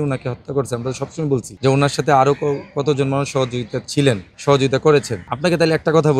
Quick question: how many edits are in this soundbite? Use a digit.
3